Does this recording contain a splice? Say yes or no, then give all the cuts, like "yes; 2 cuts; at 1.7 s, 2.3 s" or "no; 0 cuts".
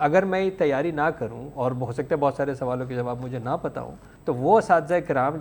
yes; 1 cut; at 4.0 s